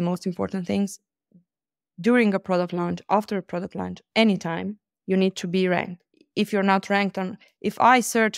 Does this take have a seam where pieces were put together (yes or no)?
no